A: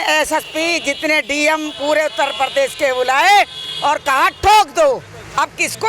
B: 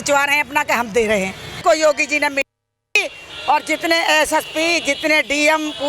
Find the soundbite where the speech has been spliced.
B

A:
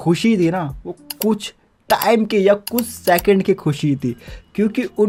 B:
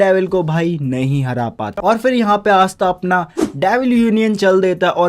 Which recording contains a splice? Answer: B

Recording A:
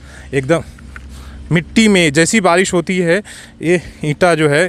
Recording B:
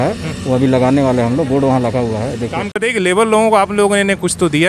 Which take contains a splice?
B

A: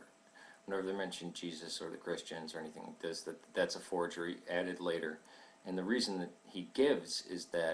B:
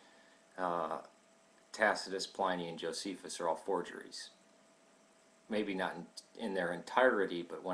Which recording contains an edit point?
A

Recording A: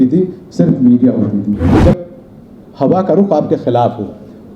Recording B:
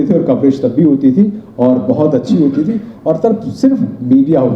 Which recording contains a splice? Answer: A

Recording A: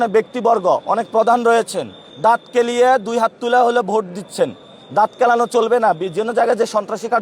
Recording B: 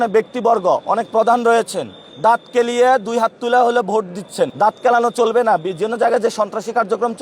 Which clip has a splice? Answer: B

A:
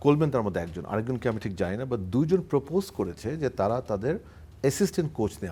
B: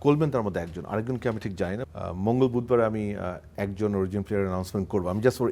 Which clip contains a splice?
B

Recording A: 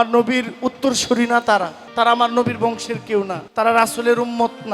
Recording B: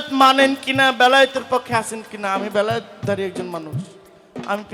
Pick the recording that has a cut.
A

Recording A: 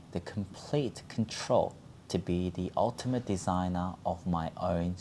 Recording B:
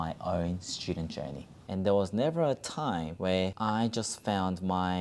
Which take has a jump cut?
B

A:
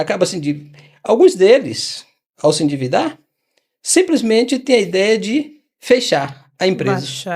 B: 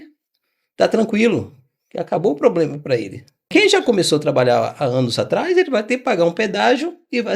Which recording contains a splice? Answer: B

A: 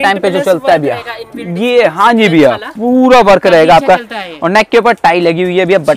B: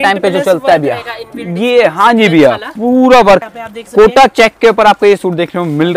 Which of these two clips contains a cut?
B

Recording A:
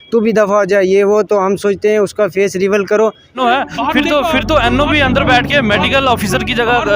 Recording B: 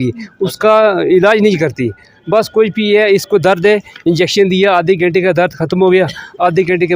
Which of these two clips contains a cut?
A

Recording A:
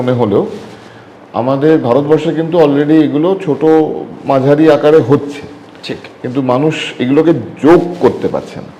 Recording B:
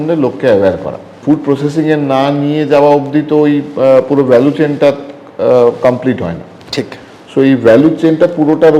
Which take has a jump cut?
B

